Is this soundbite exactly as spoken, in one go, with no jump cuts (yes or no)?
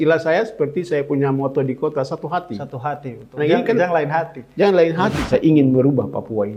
no